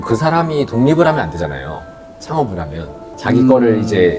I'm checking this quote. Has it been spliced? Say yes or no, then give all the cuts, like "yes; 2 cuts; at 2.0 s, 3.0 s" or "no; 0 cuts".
yes; 1 cut; at 3.0 s